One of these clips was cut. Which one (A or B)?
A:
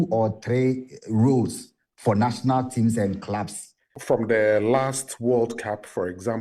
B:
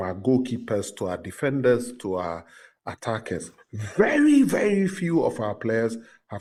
A